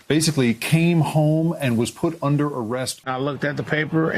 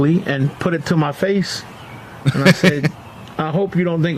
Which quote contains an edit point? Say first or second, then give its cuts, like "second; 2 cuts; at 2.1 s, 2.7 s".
first; 1 cut; at 2.9 s